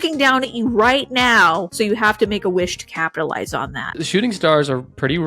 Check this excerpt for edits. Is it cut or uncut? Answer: cut